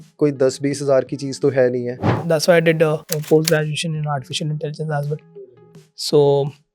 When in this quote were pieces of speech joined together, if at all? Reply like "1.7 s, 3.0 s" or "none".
2.1 s, 3.1 s